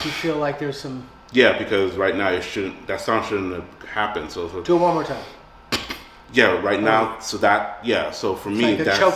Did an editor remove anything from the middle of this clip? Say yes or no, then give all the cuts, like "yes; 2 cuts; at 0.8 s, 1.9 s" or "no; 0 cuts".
no; 0 cuts